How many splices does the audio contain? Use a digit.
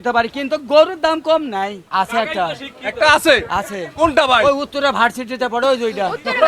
0